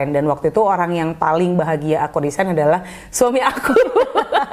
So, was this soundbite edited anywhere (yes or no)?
no